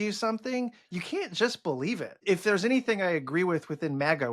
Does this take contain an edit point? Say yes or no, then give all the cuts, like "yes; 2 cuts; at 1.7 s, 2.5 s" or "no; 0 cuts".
yes; 1 cut; at 2.1 s